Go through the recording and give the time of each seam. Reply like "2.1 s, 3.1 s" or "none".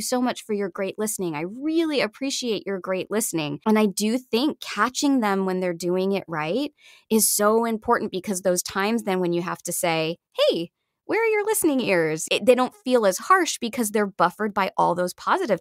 3.6 s, 12.2 s